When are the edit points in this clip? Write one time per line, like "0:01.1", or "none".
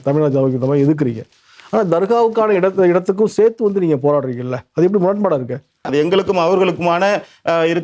0:05.9